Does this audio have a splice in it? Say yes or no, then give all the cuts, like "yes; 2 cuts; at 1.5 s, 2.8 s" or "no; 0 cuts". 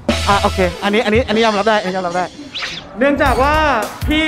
yes; 1 cut; at 2.5 s